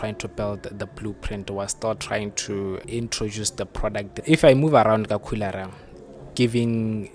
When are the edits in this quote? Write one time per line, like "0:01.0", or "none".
0:02.8
0:04.1